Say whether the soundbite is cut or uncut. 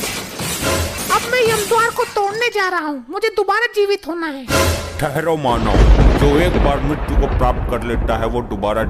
cut